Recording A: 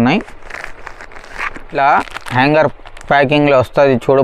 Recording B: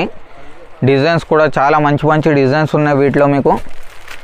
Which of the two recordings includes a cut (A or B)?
A